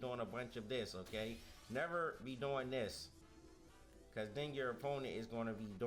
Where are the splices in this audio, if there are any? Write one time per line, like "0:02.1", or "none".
0:02.0

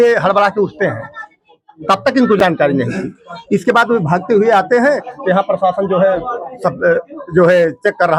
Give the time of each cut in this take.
none

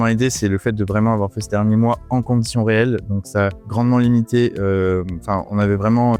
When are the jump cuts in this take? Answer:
none

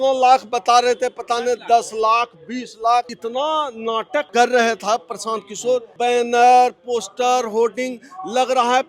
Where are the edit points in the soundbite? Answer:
0:03.1
0:04.3
0:05.9

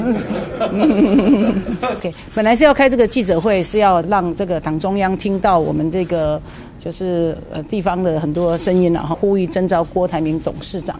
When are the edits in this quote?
0:02.1
0:04.1
0:09.2

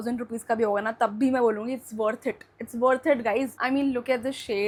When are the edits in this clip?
none

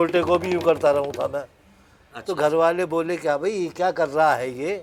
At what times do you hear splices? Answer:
none

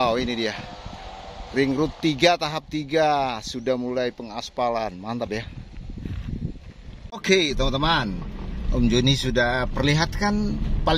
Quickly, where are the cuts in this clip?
0:07.2

